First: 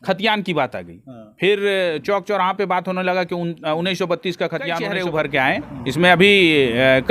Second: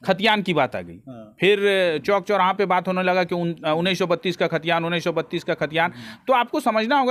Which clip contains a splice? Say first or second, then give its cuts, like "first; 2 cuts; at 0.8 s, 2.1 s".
first; 1 cut; at 5.0 s